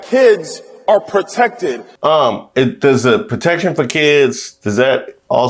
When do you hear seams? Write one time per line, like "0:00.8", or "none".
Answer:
0:01.9

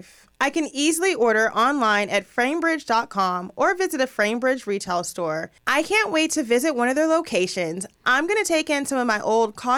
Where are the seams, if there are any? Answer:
0:05.5

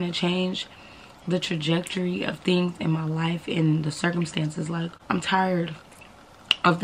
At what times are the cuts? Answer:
0:05.0

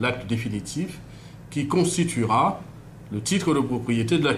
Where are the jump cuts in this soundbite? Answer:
none

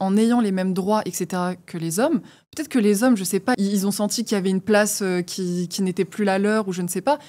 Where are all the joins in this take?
0:03.5

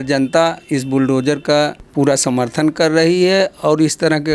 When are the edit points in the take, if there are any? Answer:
0:01.8

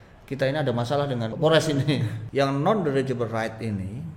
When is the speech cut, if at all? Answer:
0:01.3
0:02.2

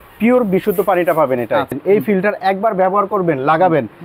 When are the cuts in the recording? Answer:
0:01.8

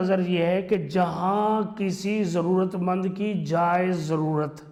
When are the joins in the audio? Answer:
none

